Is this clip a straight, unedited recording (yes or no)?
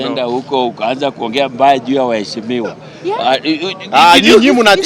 yes